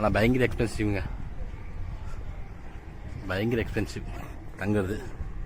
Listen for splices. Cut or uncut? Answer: uncut